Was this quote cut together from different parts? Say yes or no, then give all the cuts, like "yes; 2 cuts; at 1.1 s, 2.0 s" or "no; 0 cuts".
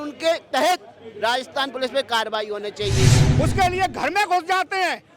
yes; 1 cut; at 3.3 s